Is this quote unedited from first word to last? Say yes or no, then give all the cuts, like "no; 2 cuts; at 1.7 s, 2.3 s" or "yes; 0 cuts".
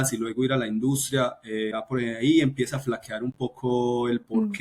no; 1 cut; at 1.7 s